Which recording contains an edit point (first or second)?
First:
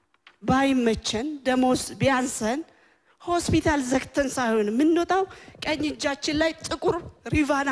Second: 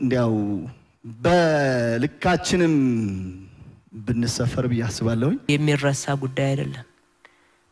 second